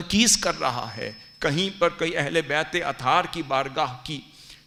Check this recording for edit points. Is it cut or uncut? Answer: uncut